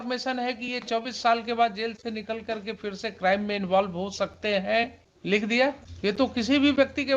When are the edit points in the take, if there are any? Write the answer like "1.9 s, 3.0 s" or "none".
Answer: 5.1 s, 5.9 s